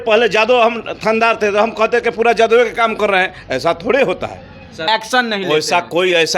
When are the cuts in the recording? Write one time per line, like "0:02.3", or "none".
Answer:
0:04.9